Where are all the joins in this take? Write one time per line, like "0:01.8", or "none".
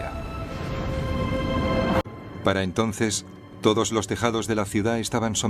0:02.0